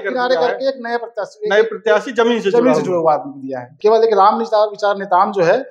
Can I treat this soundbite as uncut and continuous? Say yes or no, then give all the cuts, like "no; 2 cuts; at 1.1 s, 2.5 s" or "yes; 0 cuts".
no; 1 cut; at 3.7 s